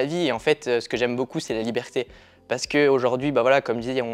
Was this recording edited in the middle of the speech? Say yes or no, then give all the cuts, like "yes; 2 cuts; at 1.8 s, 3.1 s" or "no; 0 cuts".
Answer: no; 0 cuts